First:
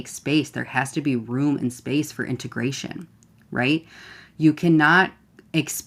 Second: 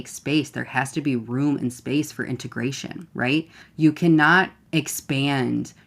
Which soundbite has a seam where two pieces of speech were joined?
second; 2 cuts; at 3.4 s, 4.6 s

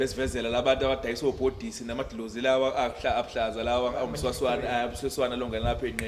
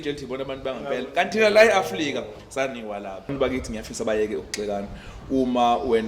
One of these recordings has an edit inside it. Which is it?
second; 1 cut; at 3.3 s

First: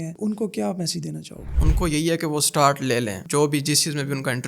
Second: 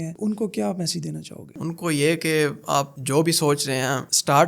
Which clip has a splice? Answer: first; 1 cut; at 1.5 s

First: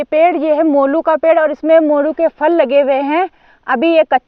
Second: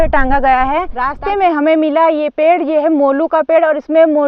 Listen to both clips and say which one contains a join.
second; 1 cut; at 1.0 s

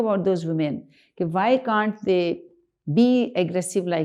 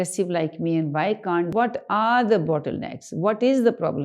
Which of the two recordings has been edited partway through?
second; 1 cut; at 1.5 s

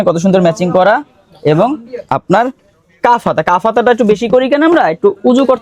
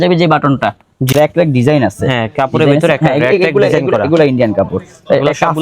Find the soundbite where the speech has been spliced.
second; 1 cut; at 1.1 s

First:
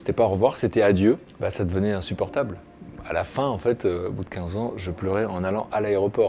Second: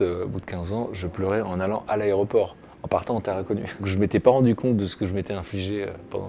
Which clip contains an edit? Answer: second; 1 cut; at 3.9 s

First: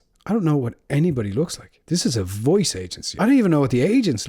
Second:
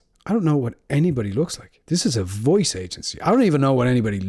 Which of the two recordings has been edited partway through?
first; 1 cut; at 3.1 s

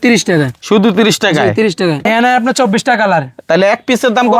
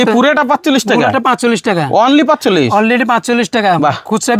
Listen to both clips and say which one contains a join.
first; 1 cut; at 2.1 s

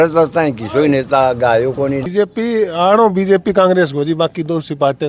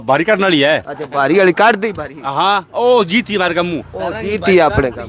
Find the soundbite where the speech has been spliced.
first; 1 cut; at 2.0 s

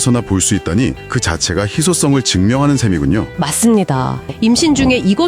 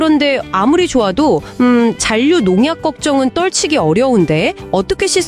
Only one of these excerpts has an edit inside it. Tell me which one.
first; 1 cut; at 4.2 s

